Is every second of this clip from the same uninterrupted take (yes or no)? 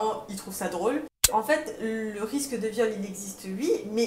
no